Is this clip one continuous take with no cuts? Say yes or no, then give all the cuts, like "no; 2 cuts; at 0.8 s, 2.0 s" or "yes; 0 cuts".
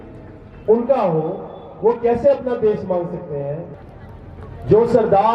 no; 1 cut; at 3.6 s